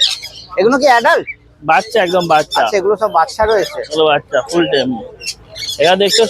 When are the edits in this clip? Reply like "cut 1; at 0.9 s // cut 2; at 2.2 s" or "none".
none